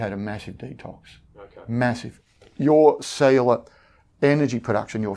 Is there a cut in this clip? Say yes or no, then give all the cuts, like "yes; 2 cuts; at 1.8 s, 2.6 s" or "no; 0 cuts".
yes; 1 cut; at 2.1 s